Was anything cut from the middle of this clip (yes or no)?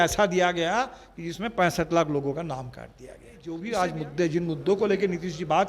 yes